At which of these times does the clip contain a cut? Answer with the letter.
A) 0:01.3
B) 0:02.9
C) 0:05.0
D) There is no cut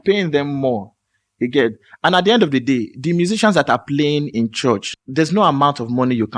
C